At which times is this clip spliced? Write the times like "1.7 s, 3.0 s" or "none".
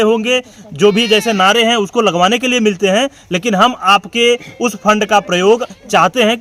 none